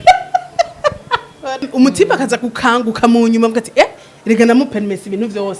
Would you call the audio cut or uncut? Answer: cut